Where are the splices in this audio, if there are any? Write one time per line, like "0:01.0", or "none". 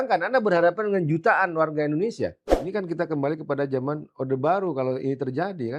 0:02.5